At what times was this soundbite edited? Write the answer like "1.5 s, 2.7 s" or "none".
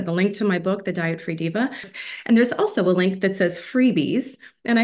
1.9 s